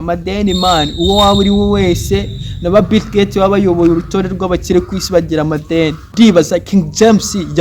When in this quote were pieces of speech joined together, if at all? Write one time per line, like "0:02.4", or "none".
0:06.0